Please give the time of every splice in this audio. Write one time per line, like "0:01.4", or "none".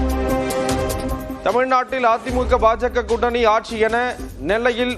0:00.9